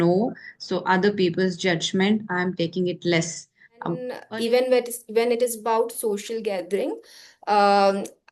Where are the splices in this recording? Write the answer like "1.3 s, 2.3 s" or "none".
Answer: 4.2 s